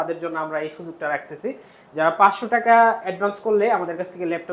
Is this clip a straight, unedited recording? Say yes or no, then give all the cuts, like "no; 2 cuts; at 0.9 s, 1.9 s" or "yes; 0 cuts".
yes; 0 cuts